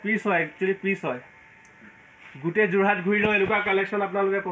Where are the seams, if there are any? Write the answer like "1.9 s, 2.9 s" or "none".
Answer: none